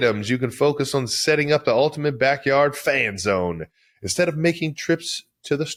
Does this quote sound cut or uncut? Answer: uncut